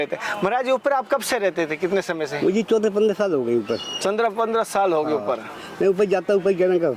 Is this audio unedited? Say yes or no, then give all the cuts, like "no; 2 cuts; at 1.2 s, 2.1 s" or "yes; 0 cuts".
yes; 0 cuts